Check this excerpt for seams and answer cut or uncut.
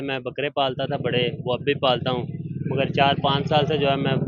uncut